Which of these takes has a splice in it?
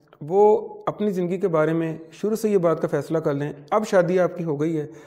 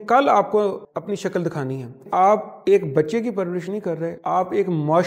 second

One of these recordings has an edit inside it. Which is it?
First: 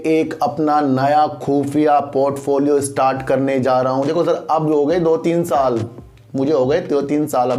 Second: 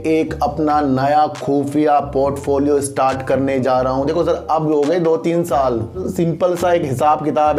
second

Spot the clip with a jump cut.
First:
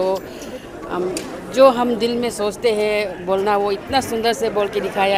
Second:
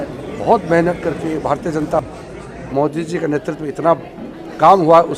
second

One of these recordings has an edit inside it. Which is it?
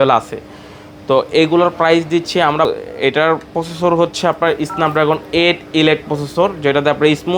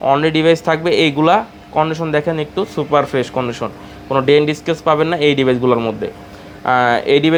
first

